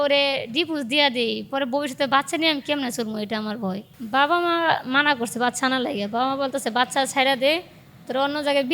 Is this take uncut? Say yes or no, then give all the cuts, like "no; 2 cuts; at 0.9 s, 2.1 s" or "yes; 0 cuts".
no; 1 cut; at 3.9 s